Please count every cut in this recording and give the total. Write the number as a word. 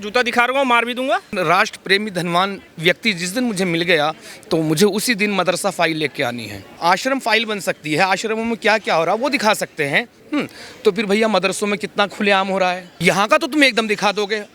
three